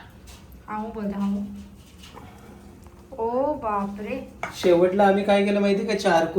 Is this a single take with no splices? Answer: yes; 0 cuts

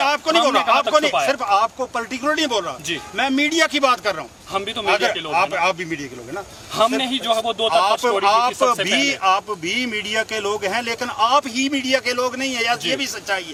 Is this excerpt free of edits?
yes; 0 cuts

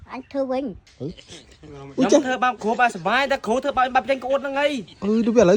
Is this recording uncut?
yes; 0 cuts

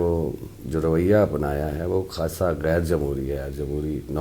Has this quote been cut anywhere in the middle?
no; 0 cuts

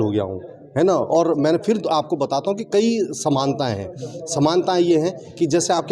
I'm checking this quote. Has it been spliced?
no; 0 cuts

